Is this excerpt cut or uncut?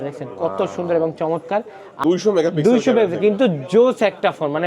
cut